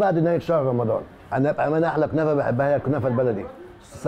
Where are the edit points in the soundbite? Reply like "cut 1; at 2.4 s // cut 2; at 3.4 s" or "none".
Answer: cut 1; at 1.2 s